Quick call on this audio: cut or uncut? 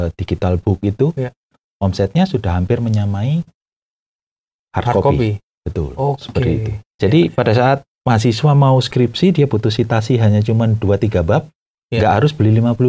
cut